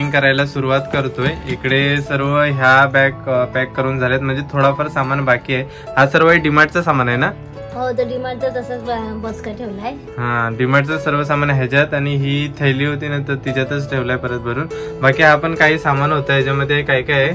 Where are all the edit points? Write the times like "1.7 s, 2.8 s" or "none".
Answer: none